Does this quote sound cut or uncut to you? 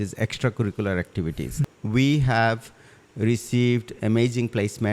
cut